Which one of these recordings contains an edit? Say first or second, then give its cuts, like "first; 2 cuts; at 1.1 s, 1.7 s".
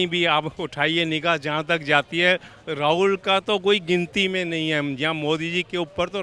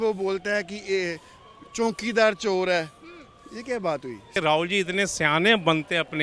second; 1 cut; at 4.2 s